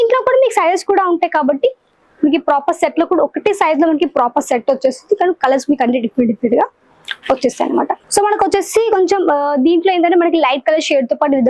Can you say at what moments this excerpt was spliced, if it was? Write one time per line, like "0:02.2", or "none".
0:08.0

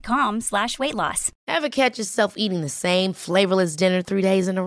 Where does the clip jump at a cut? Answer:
0:01.3

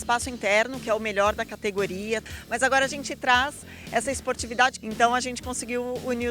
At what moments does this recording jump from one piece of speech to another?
0:02.3
0:04.8

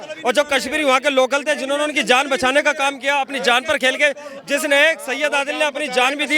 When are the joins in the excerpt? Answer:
none

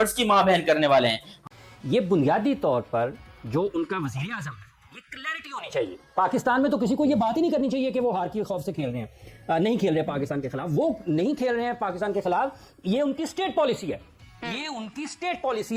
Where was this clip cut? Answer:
0:01.4

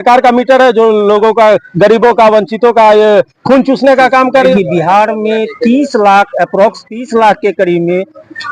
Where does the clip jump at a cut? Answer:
0:04.5

